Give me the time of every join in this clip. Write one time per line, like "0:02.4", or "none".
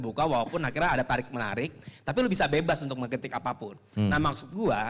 none